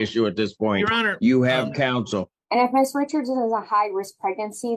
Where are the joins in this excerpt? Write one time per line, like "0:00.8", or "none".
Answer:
0:02.3